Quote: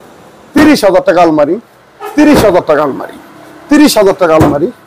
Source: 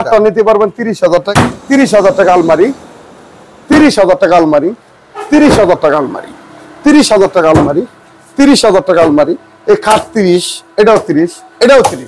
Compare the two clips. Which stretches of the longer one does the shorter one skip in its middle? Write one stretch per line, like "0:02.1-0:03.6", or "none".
none

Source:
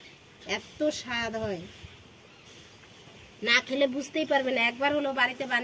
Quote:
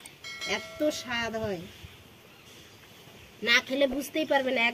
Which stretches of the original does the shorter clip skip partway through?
none

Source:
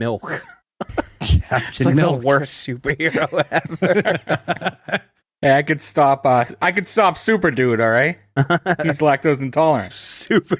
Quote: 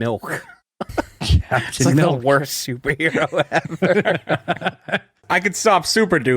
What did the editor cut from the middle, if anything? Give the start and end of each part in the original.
0:05.2-0:06.5

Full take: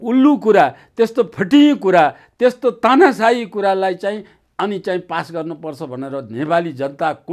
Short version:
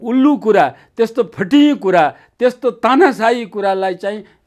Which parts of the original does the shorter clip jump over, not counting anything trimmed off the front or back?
none

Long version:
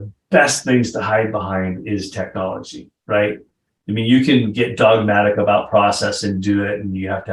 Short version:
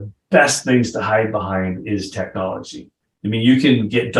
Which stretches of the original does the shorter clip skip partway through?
0:02.9-0:03.5

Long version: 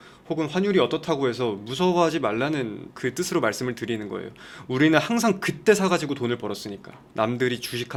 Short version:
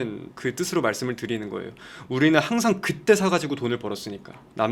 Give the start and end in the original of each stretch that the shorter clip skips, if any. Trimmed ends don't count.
none

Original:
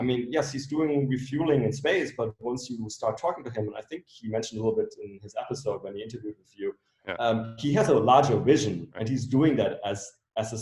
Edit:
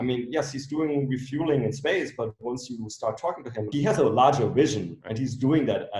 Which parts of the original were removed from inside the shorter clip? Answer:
0:03.7-0:07.6

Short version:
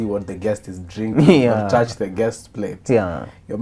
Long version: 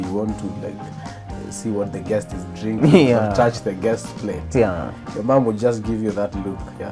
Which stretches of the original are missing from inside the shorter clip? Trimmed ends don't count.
none

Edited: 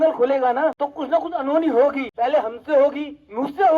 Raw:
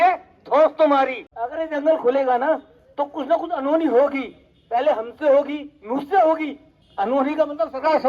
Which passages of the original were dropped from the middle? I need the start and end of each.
0:02.7-0:03.0
0:04.2-0:04.6

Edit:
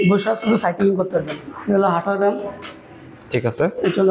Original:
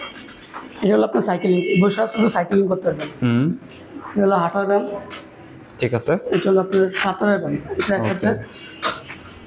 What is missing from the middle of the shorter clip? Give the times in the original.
0:03.1-0:03.8

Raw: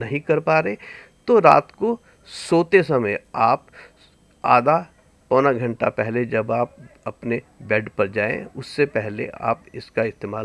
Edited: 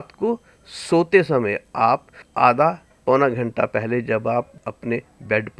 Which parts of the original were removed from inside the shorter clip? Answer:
0:03.8-0:04.3
0:05.0-0:05.1
0:06.9-0:07.0

